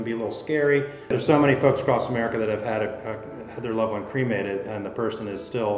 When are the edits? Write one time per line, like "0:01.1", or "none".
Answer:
0:01.1